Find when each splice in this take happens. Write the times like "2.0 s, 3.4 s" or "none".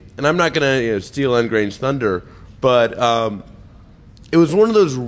none